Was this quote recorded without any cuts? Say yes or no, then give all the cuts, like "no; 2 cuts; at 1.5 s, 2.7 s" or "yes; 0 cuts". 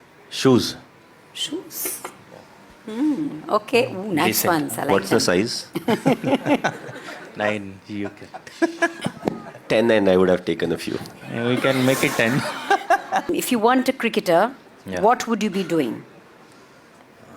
no; 1 cut; at 13.4 s